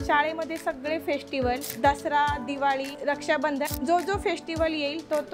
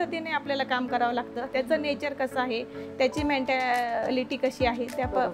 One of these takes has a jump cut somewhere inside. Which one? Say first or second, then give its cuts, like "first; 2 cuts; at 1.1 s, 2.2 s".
first; 2 cuts; at 1.7 s, 3.5 s